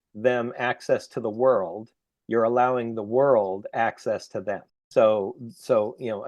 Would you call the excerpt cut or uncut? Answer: cut